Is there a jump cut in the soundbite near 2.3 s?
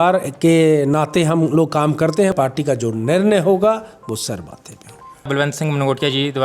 yes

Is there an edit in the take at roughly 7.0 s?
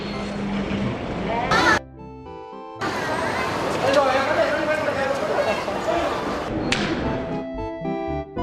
no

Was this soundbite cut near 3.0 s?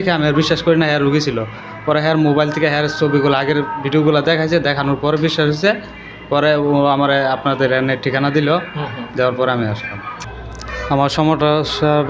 no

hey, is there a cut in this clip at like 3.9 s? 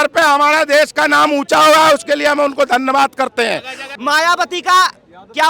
yes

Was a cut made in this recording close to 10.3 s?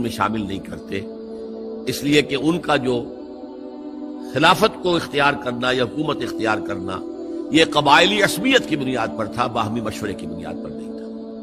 yes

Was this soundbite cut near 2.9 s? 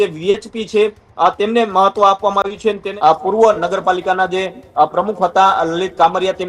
yes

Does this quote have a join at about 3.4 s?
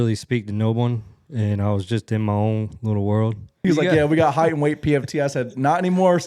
yes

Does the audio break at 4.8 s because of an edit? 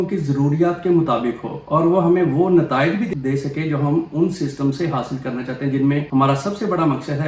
no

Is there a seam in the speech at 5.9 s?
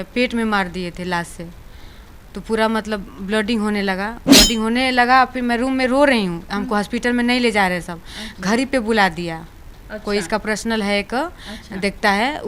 no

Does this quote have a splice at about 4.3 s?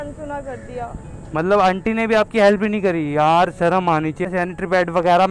yes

